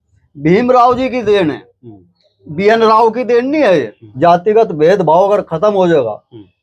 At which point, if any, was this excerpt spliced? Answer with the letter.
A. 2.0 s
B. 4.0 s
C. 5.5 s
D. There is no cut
B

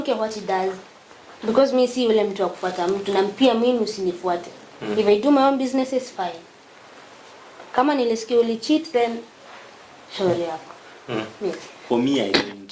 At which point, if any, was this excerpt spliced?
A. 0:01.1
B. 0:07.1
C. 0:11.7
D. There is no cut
C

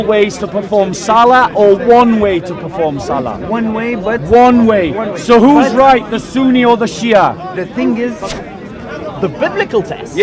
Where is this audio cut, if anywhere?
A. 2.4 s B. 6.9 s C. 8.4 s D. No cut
C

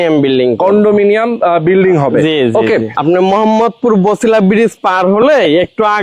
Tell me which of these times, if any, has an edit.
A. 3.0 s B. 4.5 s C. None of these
A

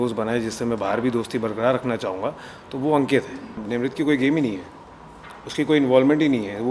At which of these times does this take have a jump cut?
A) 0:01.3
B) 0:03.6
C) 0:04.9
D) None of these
B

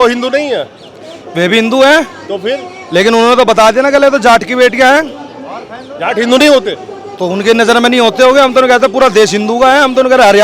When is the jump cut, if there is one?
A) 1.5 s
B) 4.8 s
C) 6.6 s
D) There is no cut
D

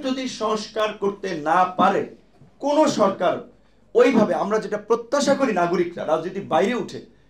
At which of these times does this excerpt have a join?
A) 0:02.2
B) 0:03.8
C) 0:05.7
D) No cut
D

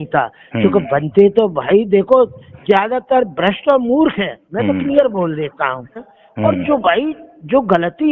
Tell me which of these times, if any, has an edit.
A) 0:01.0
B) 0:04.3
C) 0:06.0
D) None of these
C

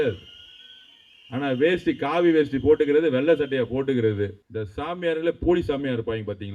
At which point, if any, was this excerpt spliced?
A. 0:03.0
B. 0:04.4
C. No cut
B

